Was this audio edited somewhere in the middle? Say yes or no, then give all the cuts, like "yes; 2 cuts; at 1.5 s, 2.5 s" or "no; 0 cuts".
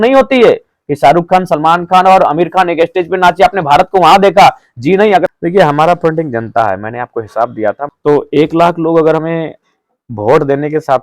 yes; 2 cuts; at 5.2 s, 7.9 s